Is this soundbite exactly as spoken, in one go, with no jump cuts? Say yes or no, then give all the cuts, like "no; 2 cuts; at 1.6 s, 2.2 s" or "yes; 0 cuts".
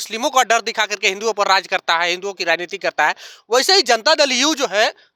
yes; 0 cuts